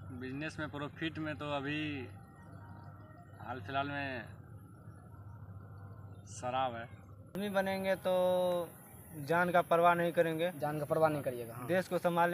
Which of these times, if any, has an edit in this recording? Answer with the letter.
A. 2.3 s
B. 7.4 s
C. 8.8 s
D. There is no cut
B